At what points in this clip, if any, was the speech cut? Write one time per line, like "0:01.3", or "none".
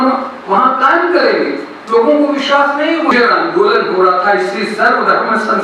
0:03.1